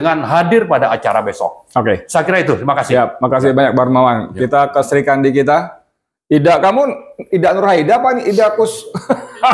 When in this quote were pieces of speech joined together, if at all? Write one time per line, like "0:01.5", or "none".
none